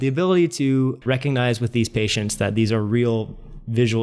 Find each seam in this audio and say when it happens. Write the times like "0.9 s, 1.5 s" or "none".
1.0 s